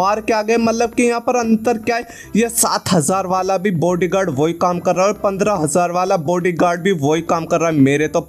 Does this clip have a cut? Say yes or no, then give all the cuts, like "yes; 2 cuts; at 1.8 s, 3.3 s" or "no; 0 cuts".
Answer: no; 0 cuts